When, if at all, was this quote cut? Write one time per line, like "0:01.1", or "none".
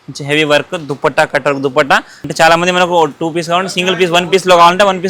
0:02.2

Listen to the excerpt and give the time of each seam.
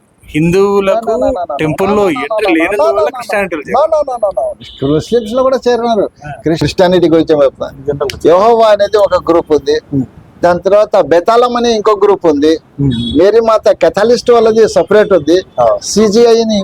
0:06.6

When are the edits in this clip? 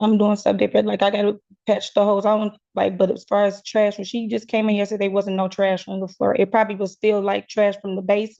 none

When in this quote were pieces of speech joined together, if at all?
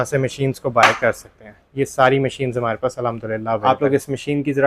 0:03.6

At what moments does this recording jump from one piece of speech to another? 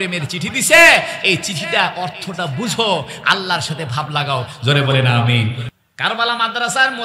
0:05.6

